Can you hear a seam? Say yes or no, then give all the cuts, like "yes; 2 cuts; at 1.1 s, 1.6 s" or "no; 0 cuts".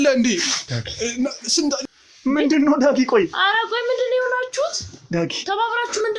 yes; 1 cut; at 1.8 s